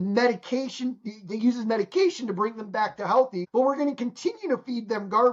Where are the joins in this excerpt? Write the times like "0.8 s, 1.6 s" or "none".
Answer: 3.4 s

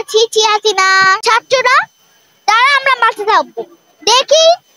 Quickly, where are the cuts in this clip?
1.2 s

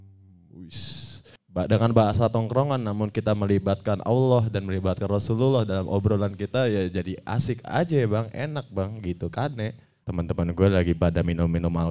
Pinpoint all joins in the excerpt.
1.3 s, 10.0 s

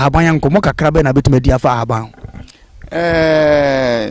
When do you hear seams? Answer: none

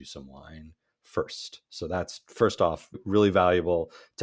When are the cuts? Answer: 3.0 s

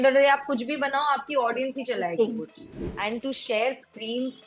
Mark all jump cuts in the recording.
2.9 s

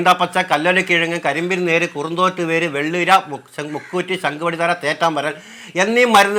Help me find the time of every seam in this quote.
none

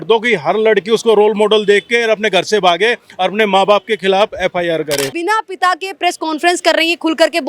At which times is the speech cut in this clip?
5.1 s

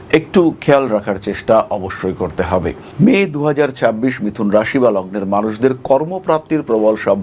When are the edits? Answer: 2.8 s

